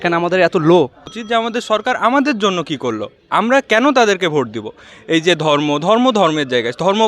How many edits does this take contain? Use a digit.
1